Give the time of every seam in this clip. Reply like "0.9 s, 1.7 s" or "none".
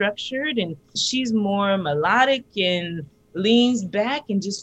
1.0 s